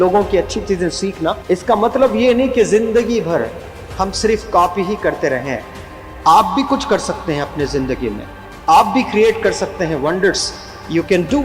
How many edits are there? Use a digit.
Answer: 1